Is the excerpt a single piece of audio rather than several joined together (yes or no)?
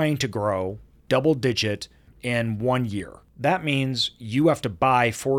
no